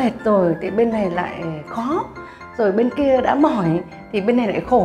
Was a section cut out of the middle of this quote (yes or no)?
no